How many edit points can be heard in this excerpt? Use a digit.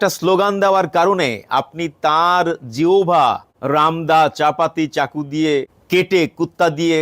2